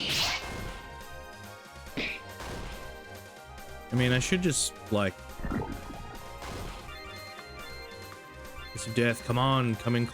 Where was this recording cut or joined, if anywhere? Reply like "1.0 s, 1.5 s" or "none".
6.9 s